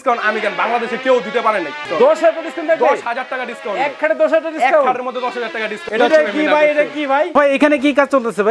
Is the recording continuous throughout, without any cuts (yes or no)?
no